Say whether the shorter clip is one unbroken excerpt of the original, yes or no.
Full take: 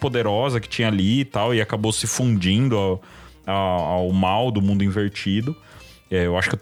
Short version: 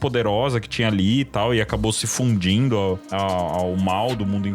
no